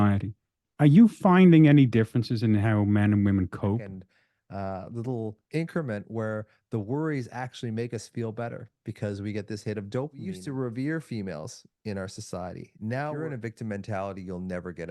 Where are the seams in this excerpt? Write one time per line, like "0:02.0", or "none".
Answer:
0:04.0
0:10.4
0:13.2